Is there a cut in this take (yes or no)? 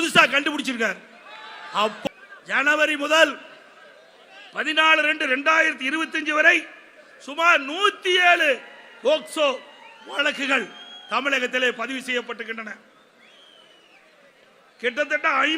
yes